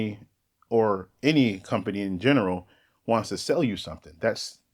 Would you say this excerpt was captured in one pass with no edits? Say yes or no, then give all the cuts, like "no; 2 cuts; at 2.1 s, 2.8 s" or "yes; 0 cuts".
yes; 0 cuts